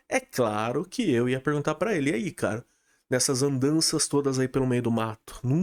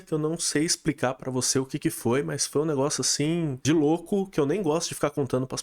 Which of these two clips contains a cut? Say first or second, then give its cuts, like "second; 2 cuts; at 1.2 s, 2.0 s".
second; 1 cut; at 3.6 s